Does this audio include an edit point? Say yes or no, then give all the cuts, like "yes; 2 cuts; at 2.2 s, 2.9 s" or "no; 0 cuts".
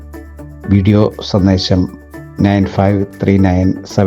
no; 0 cuts